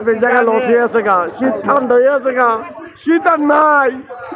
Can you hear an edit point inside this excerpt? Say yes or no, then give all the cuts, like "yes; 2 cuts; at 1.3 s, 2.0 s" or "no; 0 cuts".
no; 0 cuts